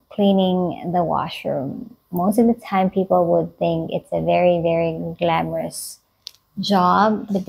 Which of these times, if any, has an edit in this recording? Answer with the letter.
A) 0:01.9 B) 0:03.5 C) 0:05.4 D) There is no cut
D